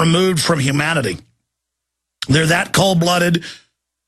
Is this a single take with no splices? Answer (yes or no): no